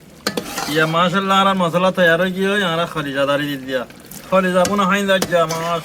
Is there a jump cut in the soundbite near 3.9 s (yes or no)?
no